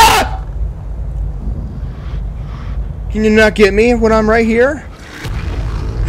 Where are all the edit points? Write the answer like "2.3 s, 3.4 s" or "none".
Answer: 2.5 s